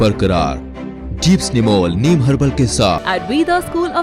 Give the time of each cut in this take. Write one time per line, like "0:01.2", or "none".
0:03.0

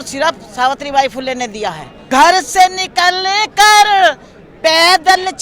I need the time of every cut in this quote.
0:01.9

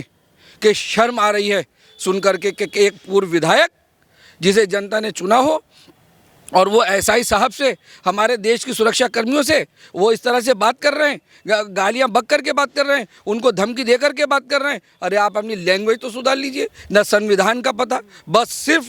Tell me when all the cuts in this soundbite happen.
none

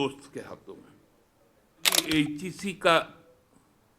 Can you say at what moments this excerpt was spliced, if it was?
0:02.0

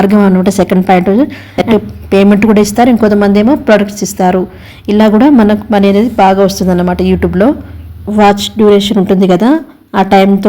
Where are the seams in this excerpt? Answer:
0:01.4
0:07.7

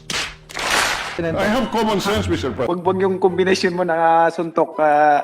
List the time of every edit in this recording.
0:02.6

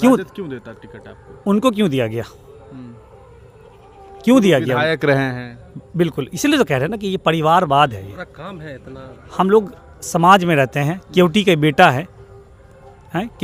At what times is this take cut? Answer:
none

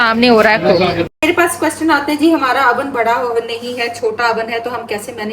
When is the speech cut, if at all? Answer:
0:01.2

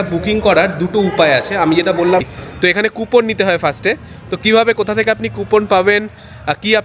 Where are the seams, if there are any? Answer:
0:02.3

